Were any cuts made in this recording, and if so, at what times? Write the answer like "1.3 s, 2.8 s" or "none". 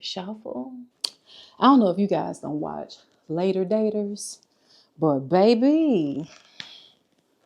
1.0 s